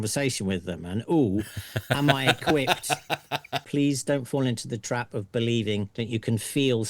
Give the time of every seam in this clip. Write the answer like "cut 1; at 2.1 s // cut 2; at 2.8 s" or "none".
cut 1; at 3.6 s // cut 2; at 5.9 s